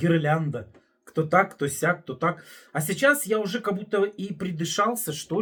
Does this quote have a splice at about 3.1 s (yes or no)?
no